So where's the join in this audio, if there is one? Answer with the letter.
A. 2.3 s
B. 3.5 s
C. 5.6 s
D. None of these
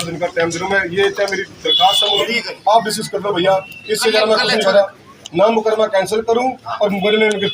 A